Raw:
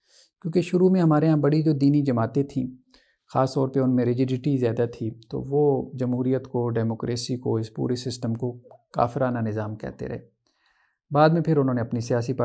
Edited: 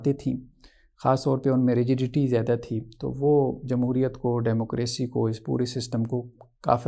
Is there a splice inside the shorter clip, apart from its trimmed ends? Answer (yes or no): no